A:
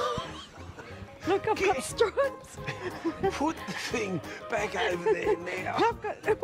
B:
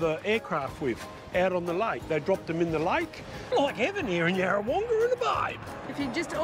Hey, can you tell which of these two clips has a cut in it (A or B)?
B